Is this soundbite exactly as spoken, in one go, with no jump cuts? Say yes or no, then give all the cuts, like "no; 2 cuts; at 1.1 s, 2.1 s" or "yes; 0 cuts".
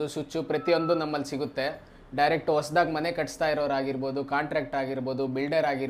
yes; 0 cuts